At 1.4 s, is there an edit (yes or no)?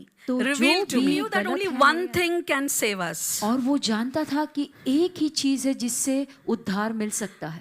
yes